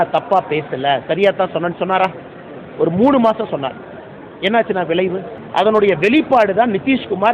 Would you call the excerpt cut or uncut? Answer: cut